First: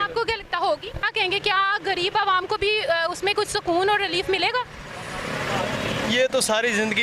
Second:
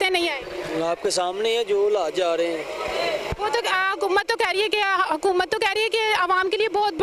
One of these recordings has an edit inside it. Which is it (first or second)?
first